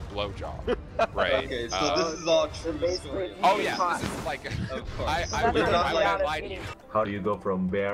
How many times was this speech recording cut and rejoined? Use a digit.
1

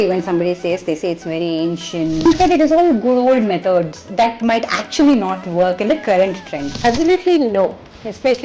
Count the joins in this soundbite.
2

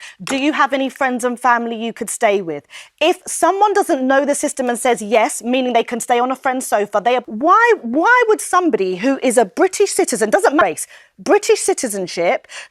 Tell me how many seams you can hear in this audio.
2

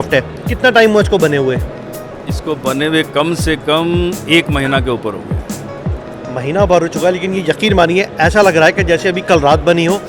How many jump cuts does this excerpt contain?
0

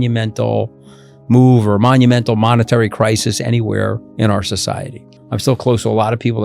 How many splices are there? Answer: 2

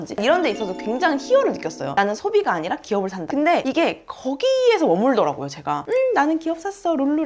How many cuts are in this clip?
2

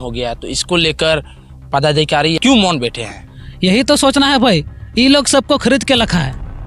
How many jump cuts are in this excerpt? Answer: 1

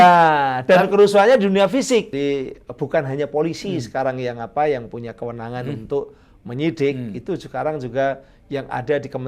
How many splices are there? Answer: 1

